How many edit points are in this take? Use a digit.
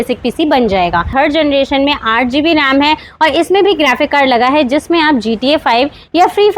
1